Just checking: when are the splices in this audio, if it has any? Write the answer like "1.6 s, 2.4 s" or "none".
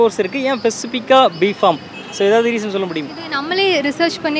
none